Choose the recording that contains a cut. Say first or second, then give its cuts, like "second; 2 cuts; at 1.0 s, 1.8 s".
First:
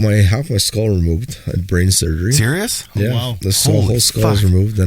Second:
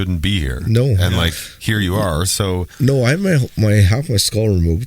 second; 1 cut; at 2.7 s